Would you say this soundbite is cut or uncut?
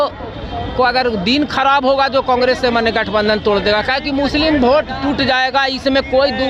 uncut